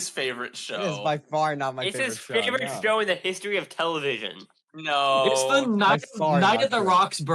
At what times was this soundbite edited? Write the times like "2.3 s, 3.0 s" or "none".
none